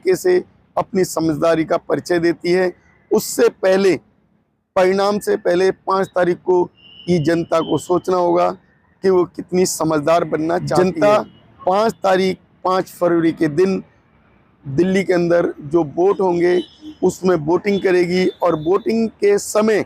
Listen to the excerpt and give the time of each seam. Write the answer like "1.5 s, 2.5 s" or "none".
10.8 s